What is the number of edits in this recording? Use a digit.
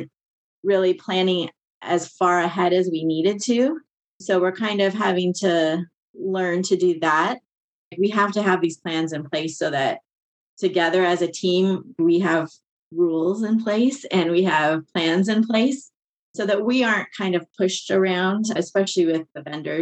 4